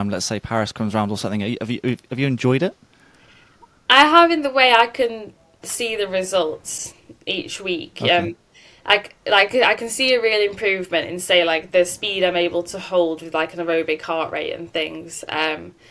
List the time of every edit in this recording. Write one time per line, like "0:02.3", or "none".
none